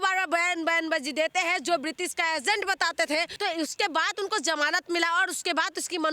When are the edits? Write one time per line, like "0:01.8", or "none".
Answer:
0:03.3